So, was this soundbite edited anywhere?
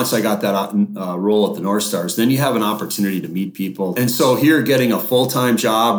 yes; 1 cut; at 3.9 s

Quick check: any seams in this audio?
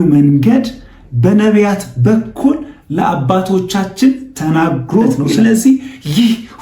yes; 1 cut; at 5.3 s

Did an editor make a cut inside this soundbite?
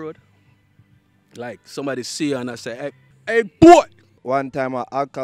yes; 2 cuts; at 3.1 s, 4.1 s

